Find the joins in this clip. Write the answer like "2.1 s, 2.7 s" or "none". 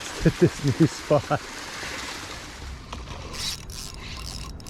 2.4 s